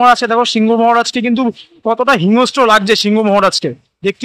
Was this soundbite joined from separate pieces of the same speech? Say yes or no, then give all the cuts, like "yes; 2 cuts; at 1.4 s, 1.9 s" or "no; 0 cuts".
no; 0 cuts